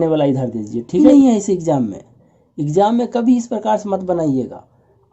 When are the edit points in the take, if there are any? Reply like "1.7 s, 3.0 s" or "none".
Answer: 1.0 s

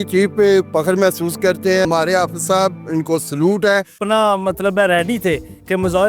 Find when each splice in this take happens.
1.8 s, 4.0 s

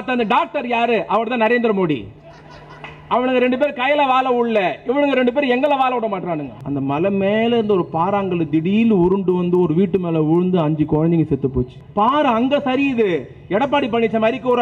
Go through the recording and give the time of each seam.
6.5 s, 11.8 s

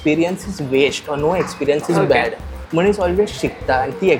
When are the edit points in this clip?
none

